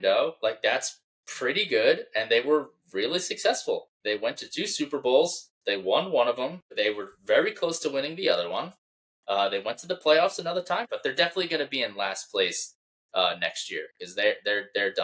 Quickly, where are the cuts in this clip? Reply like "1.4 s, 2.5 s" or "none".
3.9 s, 6.6 s, 10.9 s

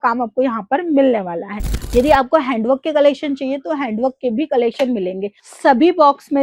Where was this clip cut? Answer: none

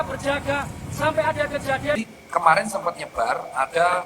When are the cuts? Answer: 2.0 s

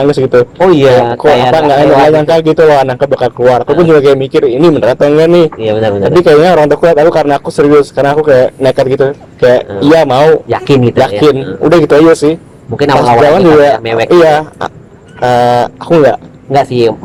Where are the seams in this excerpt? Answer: none

